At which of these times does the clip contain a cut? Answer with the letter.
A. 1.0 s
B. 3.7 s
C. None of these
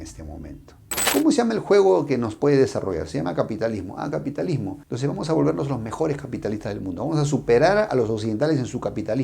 A